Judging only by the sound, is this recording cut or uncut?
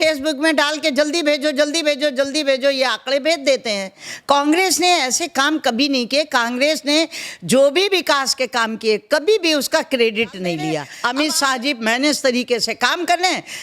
cut